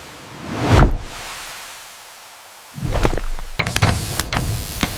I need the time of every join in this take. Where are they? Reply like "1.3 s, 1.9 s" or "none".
3.4 s